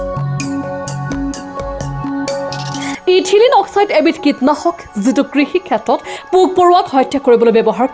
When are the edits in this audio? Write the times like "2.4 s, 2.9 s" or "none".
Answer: 1.0 s